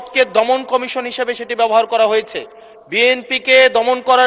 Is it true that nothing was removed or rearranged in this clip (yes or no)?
yes